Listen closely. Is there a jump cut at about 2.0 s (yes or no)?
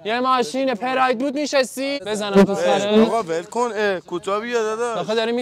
yes